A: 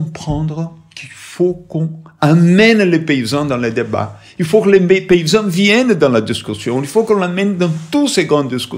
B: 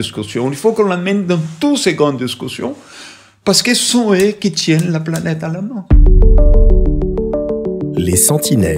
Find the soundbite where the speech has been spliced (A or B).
B